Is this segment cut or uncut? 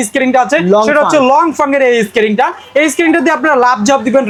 uncut